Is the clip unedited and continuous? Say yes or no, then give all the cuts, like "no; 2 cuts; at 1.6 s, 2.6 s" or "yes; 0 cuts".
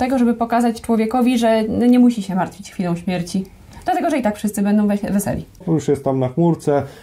no; 1 cut; at 5.6 s